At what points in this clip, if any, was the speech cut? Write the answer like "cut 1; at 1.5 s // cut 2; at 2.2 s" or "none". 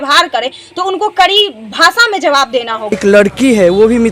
cut 1; at 3.0 s